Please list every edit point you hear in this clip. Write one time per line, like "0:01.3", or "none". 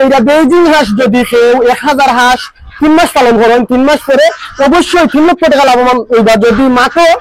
none